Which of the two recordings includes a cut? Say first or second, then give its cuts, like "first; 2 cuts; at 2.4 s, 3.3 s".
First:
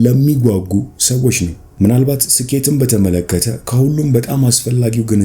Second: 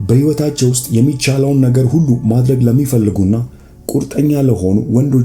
first; 1 cut; at 1.6 s